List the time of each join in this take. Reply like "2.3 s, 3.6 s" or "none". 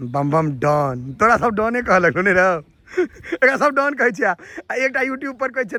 none